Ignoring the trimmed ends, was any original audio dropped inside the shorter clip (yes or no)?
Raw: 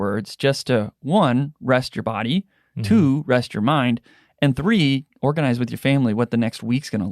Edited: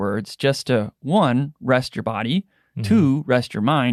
no